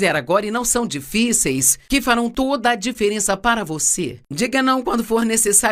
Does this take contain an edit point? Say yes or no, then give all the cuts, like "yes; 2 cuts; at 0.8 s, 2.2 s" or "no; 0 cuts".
yes; 1 cut; at 4.2 s